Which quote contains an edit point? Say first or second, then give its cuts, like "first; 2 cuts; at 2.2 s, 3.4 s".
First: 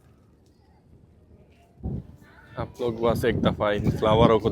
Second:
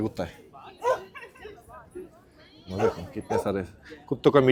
first; 1 cut; at 1.8 s